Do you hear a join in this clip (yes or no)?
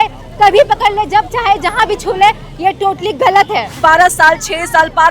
yes